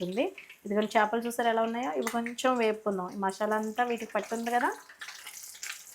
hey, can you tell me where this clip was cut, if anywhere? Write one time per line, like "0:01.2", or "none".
none